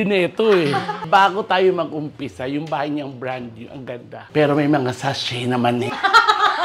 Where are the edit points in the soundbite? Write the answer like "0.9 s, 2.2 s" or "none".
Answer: 1.0 s